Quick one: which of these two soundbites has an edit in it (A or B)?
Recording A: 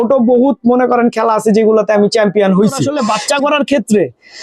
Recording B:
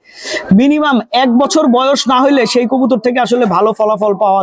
A